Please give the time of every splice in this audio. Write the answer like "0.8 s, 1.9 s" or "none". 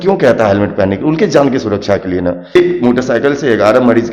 2.6 s